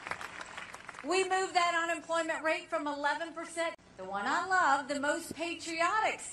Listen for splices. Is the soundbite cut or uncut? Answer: uncut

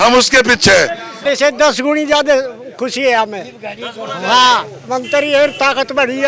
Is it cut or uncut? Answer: cut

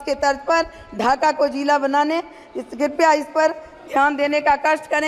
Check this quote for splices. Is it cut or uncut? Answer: uncut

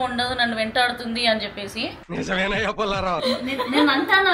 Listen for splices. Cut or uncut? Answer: cut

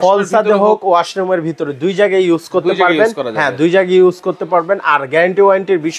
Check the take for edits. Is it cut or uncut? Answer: uncut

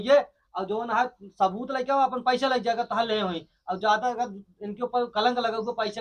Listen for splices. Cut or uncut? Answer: uncut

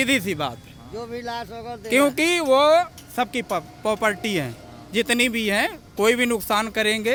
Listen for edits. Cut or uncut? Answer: uncut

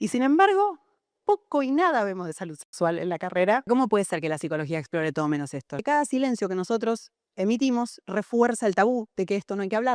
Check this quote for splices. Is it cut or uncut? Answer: cut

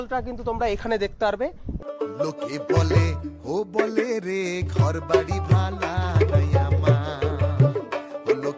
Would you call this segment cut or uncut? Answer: cut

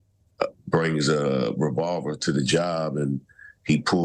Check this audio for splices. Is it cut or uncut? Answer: uncut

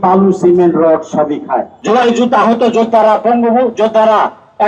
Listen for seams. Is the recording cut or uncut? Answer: cut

